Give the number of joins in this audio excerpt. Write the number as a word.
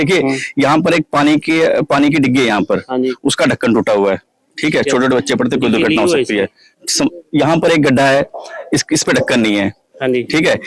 zero